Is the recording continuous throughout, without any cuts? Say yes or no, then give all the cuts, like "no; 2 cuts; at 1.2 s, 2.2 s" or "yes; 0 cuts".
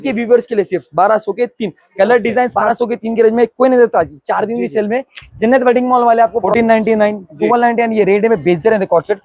no; 2 cuts; at 2.6 s, 6.5 s